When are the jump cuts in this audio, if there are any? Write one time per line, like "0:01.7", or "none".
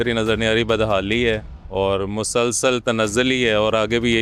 none